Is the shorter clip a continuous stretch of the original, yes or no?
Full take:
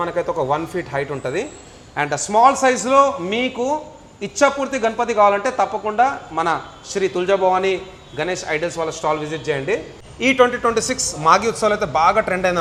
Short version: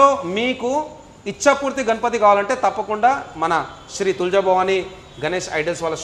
yes